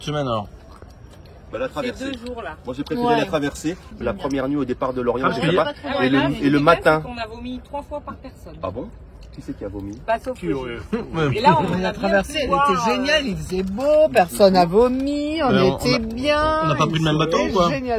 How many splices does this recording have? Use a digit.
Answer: 2